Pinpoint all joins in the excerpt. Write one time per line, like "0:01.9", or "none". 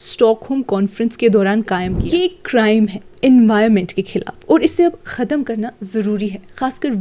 0:01.9